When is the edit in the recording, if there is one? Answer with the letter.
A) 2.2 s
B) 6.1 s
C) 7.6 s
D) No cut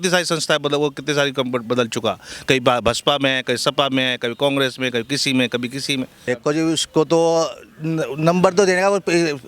B